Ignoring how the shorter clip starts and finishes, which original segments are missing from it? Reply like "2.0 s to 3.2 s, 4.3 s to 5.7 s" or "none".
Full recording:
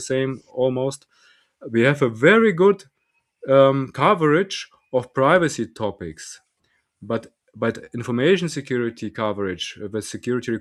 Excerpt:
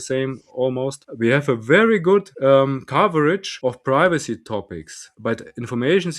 1.0 s to 1.6 s, 2.8 s to 3.4 s, 4.6 s to 4.8 s, 6.3 s to 7.4 s